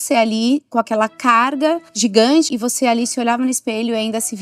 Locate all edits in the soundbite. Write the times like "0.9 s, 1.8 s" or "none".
1.9 s, 2.5 s